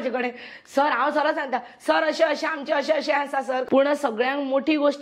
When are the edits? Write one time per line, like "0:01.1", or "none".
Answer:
0:03.6